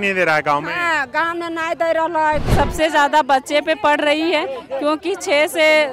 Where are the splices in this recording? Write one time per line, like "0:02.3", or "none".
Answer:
0:02.5